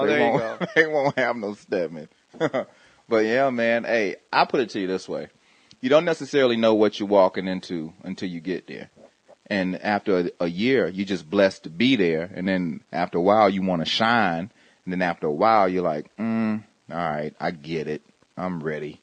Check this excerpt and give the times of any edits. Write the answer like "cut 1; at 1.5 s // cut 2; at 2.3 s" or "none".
cut 1; at 13.4 s